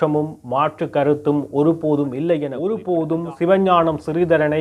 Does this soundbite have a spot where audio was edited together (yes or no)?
yes